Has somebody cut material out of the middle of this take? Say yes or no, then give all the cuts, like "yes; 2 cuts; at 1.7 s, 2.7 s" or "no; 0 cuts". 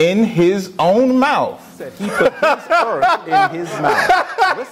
yes; 1 cut; at 2.0 s